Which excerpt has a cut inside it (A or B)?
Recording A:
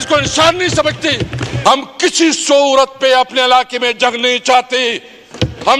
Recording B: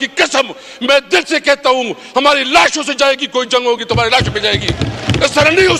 A